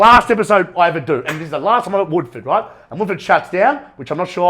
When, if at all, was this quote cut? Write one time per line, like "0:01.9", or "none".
none